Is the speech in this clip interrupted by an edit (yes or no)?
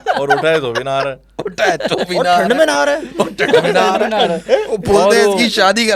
no